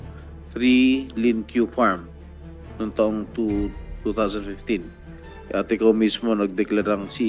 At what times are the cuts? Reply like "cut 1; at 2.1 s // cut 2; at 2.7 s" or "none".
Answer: none